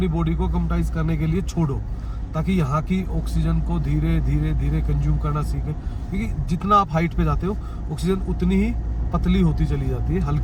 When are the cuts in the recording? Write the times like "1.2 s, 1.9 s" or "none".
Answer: none